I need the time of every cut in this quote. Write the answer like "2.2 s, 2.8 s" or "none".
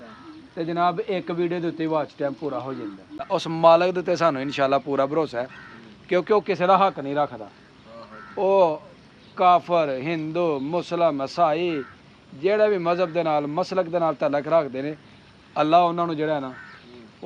3.2 s